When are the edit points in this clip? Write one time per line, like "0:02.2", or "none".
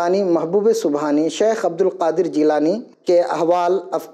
0:02.9